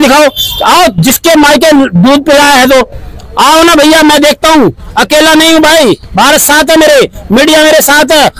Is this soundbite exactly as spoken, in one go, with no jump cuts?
yes; 0 cuts

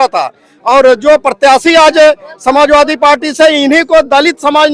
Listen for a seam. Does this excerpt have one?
no; 0 cuts

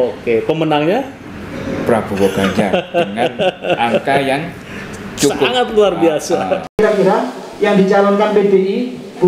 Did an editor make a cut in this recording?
yes; 1 cut; at 6.7 s

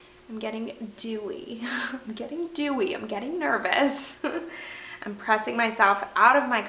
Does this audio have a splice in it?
no; 0 cuts

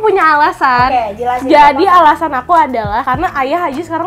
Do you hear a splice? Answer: yes; 1 cut; at 3.0 s

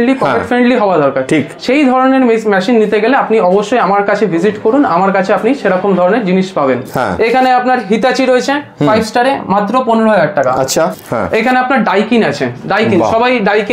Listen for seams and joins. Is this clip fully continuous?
no; 2 cuts; at 6.9 s, 11.0 s

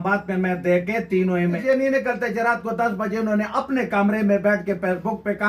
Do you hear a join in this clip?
yes; 1 cut; at 1.6 s

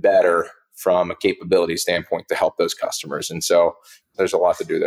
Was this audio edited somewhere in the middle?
yes; 1 cut; at 3.9 s

